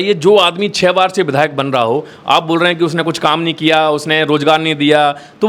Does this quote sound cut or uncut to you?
uncut